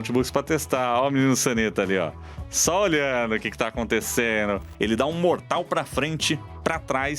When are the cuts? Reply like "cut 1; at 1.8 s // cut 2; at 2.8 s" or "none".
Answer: cut 1; at 4.7 s

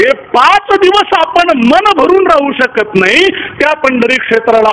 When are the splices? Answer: none

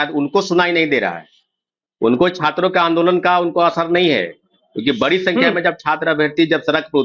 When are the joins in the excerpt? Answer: none

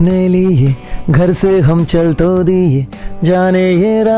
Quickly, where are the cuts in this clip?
none

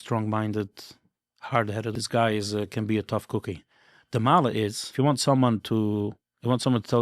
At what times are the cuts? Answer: cut 1; at 1.9 s // cut 2; at 4.8 s

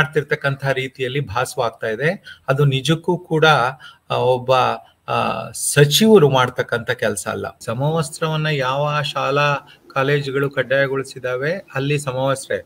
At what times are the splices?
cut 1; at 7.5 s

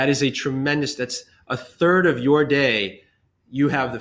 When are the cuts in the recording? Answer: none

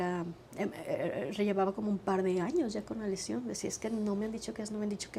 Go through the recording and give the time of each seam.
none

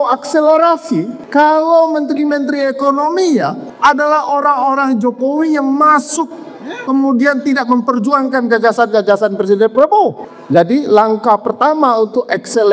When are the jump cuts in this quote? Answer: cut 1; at 1.2 s // cut 2; at 3.6 s // cut 3; at 10.3 s

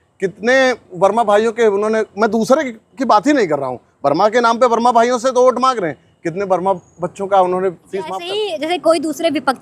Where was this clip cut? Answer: cut 1; at 8.2 s

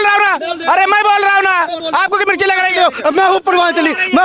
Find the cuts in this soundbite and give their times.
cut 1; at 1.8 s

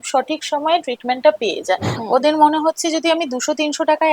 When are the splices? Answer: cut 1; at 1.9 s

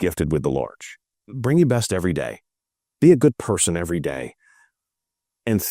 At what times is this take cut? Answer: cut 1; at 1.2 s

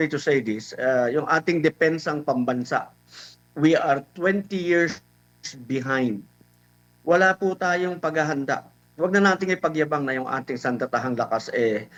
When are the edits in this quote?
none

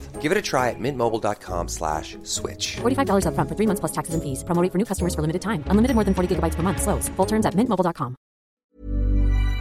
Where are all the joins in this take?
cut 1; at 8.6 s

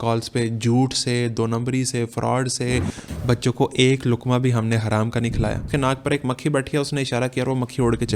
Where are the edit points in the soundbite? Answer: cut 1; at 3.1 s // cut 2; at 5.7 s

